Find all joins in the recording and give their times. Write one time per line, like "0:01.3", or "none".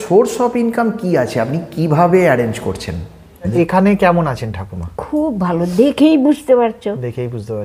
0:03.5